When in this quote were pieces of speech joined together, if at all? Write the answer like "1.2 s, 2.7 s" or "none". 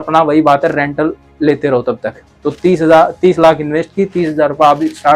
none